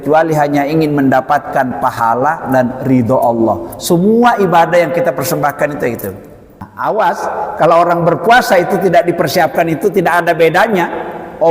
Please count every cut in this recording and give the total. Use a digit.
1